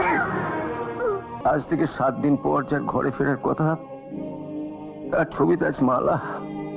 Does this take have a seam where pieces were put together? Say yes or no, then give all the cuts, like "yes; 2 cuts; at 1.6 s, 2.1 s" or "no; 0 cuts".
yes; 1 cut; at 1.3 s